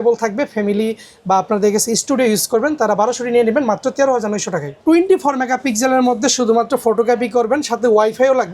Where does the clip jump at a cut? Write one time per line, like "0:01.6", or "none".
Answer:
0:04.8